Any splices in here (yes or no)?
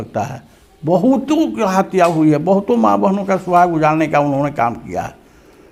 no